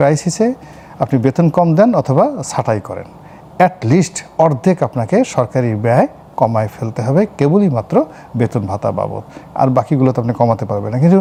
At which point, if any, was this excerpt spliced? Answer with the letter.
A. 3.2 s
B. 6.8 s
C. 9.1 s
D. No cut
D